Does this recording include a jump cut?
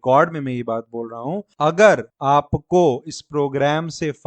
yes; 2 cuts; at 1.5 s, 2.1 s

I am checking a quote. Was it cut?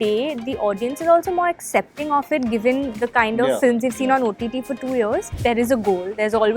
yes; 1 cut; at 5.3 s

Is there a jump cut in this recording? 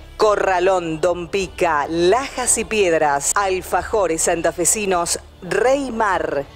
yes; 1 cut; at 3.3 s

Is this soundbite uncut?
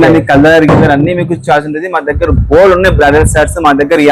yes; 0 cuts

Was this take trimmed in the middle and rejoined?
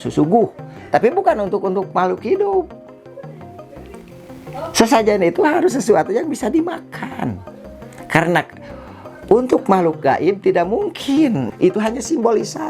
yes; 1 cut; at 11.5 s

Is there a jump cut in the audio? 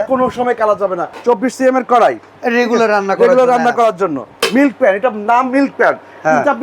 yes; 2 cuts; at 1.1 s, 4.3 s

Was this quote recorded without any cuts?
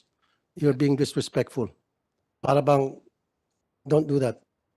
yes; 0 cuts

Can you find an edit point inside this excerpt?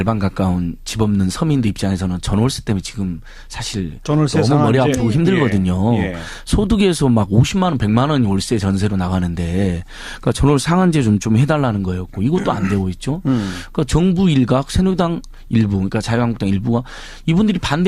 yes; 1 cut; at 6.5 s

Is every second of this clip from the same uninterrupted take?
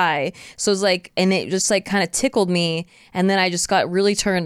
yes; 0 cuts

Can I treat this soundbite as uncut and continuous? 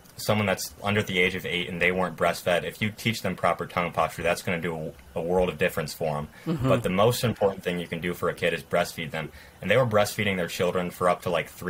yes; 0 cuts

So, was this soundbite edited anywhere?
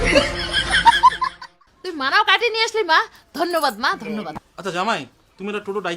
yes; 1 cut; at 4.5 s

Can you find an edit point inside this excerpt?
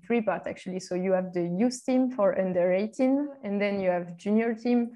yes; 1 cut; at 3.4 s

